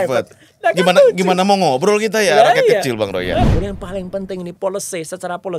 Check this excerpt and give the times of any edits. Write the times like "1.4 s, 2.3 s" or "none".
3.5 s